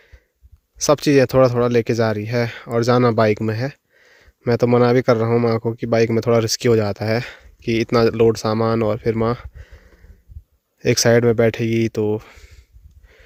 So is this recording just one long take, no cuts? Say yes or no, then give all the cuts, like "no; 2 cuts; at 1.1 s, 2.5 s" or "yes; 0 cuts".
yes; 0 cuts